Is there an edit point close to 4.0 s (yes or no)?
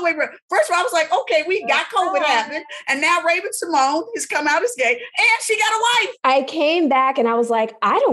no